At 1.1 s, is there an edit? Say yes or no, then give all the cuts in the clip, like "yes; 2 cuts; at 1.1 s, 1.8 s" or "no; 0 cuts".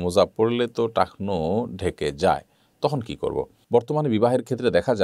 no; 1 cut; at 3.5 s